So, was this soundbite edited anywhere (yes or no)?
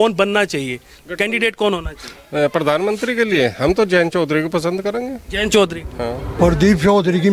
yes